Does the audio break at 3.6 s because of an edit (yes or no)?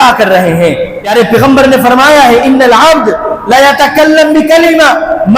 no